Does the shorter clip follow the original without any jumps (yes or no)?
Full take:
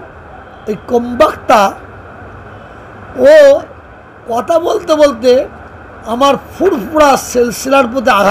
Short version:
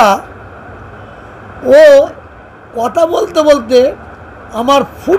yes